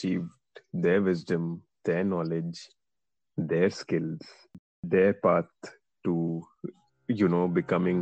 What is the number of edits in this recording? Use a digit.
1